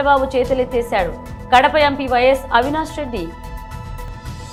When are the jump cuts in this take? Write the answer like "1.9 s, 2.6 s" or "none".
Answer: none